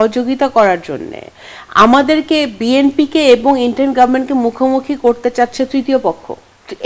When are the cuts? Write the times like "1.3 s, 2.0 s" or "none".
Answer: none